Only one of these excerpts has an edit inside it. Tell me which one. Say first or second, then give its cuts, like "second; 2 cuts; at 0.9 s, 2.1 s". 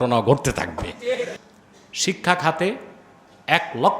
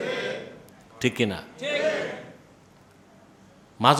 first; 1 cut; at 1.4 s